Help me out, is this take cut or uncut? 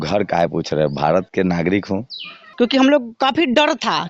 cut